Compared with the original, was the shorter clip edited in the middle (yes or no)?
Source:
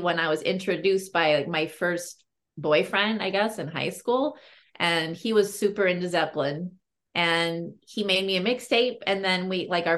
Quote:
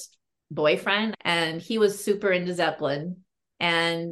yes